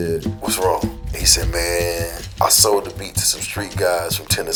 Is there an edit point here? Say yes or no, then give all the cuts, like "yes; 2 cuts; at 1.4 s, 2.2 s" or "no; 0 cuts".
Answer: no; 0 cuts